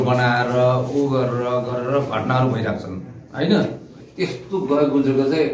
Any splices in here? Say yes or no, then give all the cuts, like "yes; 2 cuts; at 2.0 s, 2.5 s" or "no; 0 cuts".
yes; 1 cut; at 4.0 s